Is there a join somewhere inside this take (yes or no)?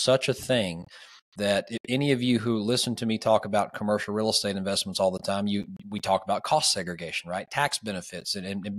no